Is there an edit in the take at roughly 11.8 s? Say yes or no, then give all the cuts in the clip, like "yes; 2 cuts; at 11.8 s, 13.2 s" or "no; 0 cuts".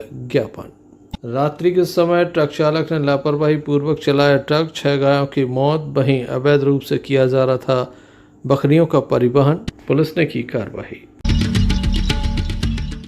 yes; 2 cuts; at 11.2 s, 11.8 s